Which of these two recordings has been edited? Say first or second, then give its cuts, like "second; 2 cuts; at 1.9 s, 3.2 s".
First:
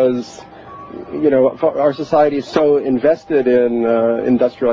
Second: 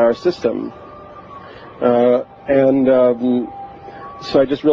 first; 1 cut; at 1.3 s